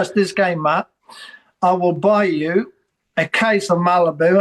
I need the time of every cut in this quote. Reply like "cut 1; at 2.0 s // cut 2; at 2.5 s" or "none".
none